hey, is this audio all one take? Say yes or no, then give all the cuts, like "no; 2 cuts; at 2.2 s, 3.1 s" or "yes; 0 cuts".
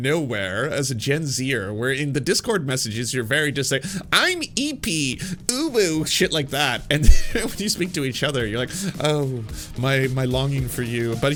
yes; 0 cuts